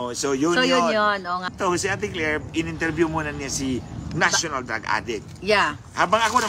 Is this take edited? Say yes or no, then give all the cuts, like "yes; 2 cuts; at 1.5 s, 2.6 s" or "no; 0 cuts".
yes; 1 cut; at 1.5 s